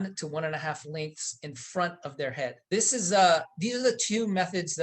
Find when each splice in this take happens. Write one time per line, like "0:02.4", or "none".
0:02.7

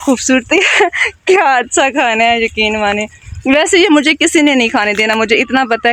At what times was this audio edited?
none

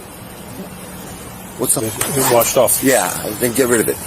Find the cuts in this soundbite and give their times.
0:01.8

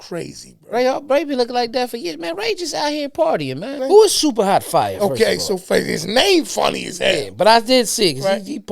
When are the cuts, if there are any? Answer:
0:03.8

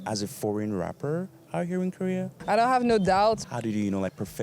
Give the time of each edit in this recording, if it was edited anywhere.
0:03.4

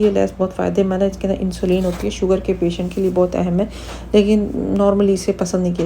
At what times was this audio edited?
none

